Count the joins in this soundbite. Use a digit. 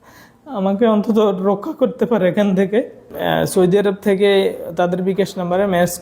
1